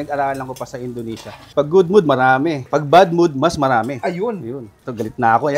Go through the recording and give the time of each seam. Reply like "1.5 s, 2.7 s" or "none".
1.5 s